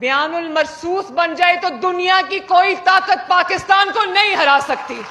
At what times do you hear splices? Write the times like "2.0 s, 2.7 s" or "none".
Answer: none